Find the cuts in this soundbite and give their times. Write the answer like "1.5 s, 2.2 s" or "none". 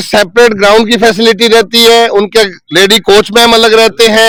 none